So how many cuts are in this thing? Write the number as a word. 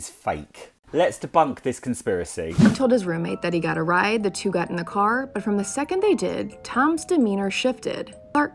one